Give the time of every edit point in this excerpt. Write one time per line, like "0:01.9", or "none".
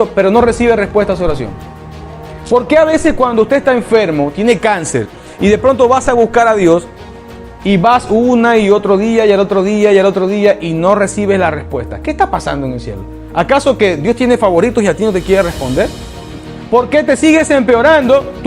none

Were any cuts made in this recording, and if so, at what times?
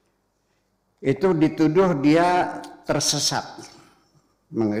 none

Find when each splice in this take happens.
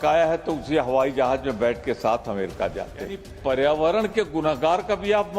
0:03.3

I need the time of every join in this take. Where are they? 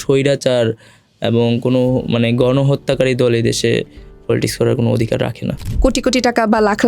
0:05.7

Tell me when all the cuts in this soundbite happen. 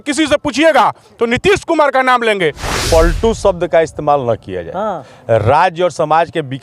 0:02.7

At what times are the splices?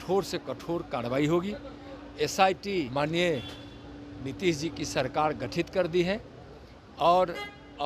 0:02.9

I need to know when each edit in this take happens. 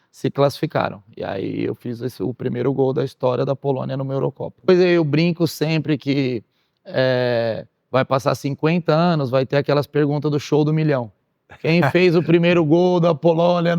0:04.7

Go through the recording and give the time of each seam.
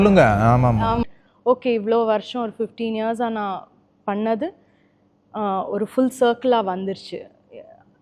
0:01.0

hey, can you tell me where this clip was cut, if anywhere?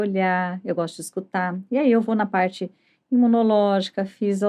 none

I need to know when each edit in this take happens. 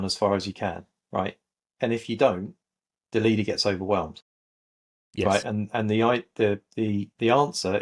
none

